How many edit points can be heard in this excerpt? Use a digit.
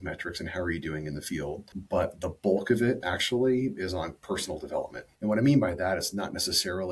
2